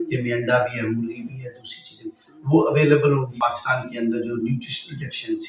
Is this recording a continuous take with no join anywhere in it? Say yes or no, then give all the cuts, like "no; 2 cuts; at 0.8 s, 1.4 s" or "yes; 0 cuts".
no; 1 cut; at 3.5 s